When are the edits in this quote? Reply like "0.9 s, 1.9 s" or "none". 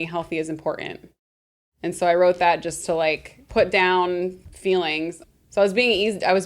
3.3 s, 4.5 s, 5.2 s